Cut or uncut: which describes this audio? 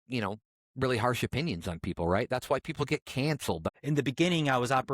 cut